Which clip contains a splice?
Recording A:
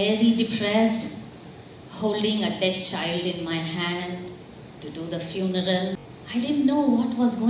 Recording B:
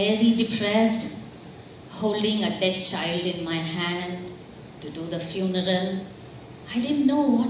A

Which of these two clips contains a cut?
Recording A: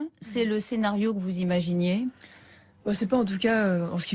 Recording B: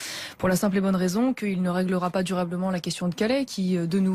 B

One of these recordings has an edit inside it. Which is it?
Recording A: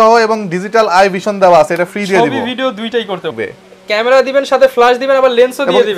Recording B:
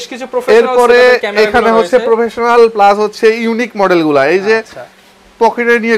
A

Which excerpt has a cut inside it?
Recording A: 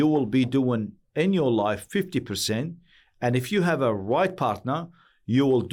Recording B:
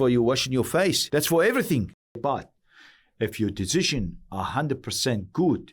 B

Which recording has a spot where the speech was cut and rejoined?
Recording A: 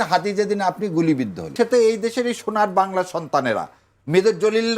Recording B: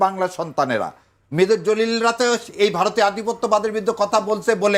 A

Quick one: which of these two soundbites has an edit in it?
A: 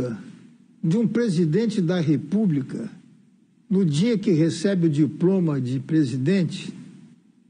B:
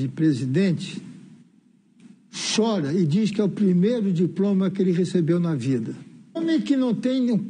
B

